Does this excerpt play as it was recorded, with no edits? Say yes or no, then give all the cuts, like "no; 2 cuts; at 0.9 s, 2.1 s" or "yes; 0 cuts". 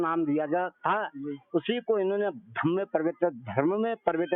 yes; 0 cuts